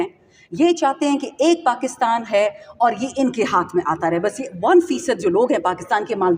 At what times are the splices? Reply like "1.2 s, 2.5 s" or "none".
none